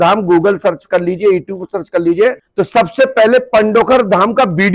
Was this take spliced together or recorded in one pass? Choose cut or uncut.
cut